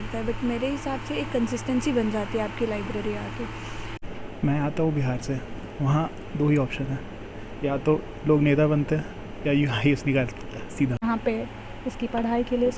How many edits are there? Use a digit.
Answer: 2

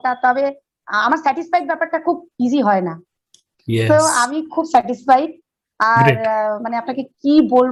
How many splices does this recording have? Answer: 0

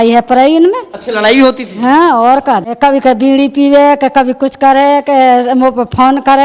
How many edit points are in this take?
1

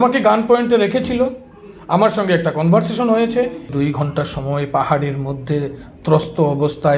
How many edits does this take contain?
1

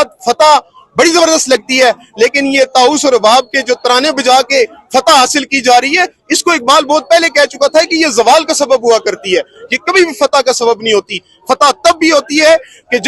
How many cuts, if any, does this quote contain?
0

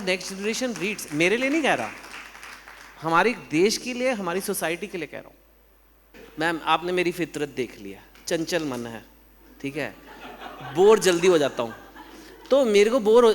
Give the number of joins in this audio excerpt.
1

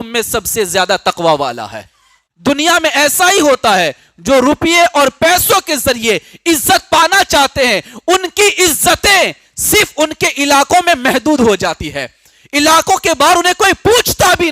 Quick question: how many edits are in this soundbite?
1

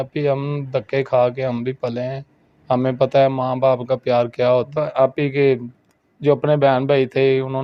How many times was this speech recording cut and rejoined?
1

